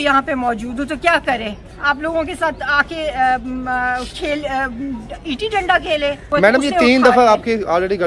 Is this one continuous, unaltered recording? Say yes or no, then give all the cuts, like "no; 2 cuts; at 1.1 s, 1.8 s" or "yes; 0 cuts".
no; 1 cut; at 6.3 s